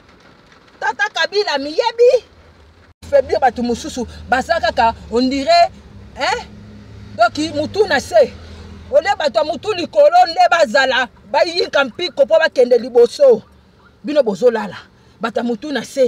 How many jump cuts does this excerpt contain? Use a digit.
1